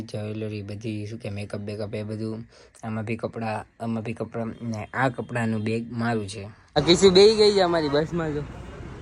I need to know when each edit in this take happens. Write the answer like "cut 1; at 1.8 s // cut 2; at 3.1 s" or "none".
cut 1; at 6.6 s